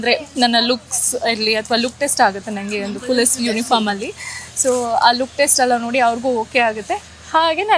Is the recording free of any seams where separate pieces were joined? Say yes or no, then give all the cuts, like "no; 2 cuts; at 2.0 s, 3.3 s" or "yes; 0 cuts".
yes; 0 cuts